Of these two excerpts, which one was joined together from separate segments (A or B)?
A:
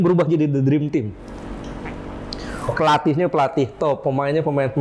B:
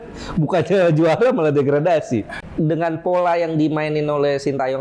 B